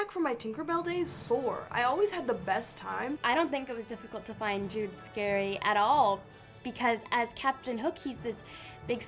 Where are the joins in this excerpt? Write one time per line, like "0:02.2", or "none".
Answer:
0:03.2